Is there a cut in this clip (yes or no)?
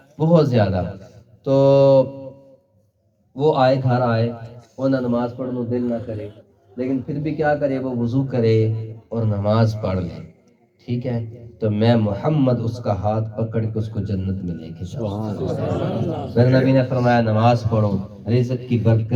no